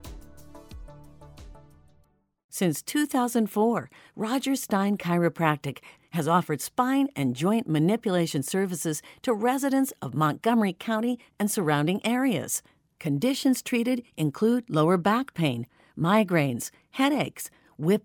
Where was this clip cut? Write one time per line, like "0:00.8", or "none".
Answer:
0:02.5